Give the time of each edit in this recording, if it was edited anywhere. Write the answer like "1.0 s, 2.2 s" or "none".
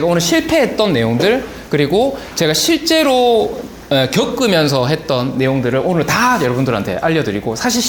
none